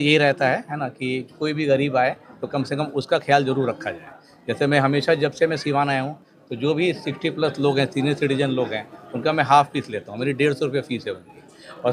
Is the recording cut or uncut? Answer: uncut